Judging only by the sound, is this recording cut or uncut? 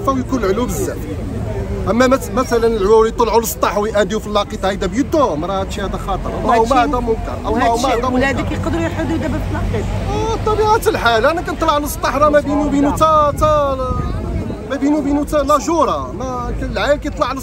uncut